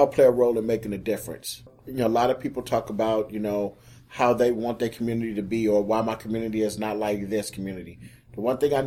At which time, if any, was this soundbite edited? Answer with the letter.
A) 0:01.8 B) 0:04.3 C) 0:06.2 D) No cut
A